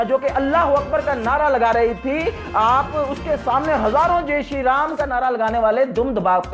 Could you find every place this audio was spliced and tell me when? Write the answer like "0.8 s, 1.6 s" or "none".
none